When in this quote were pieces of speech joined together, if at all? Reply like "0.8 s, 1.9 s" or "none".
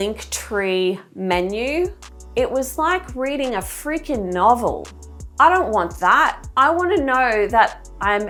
none